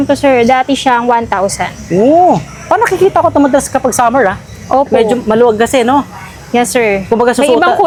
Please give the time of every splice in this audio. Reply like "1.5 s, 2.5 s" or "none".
none